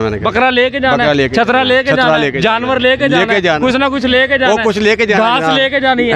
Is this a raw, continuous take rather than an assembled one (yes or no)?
yes